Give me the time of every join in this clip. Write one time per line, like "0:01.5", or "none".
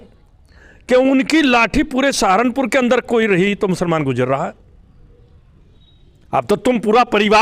0:05.8